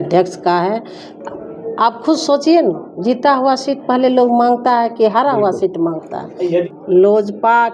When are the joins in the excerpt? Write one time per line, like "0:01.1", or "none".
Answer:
0:06.4